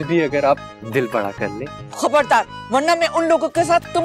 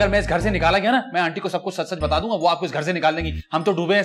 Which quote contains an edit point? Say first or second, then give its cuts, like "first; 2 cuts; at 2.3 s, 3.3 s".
first; 2 cuts; at 1.8 s, 2.6 s